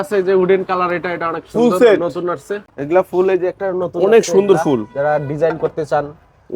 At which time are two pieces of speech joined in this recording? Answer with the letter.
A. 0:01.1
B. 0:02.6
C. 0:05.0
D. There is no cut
B